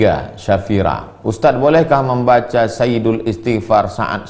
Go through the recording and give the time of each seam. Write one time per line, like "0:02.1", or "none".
none

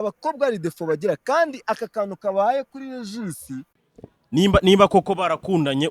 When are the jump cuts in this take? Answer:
0:03.6

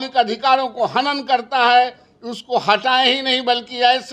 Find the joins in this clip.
none

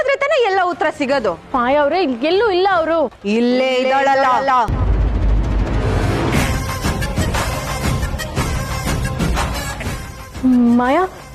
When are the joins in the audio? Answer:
0:01.4
0:04.7
0:06.4
0:10.2

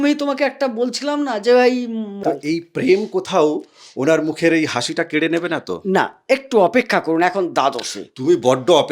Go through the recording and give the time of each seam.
0:02.1

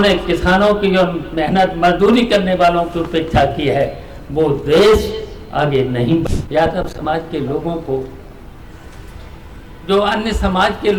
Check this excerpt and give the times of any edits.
0:06.2

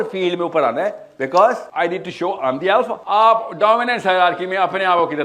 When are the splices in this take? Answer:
0:01.6
0:03.0

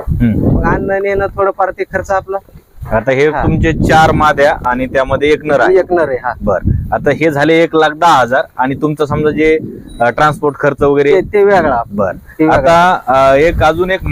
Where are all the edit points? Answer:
none

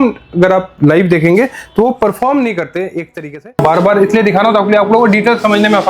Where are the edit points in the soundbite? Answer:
0:03.6

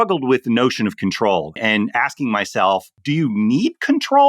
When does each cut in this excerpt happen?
0:01.6
0:02.9

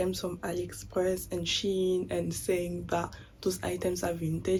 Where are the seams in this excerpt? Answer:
none

